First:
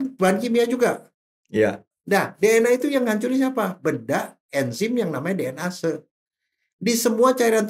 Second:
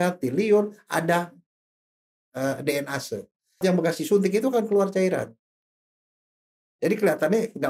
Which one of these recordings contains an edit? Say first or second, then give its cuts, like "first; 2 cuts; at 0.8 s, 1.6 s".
second; 1 cut; at 3.6 s